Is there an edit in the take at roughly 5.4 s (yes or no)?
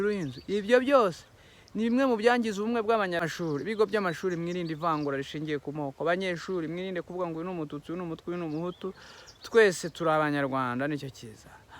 no